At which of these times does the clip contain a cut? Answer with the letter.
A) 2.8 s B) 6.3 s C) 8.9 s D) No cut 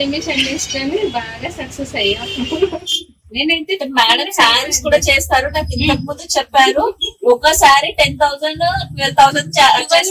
A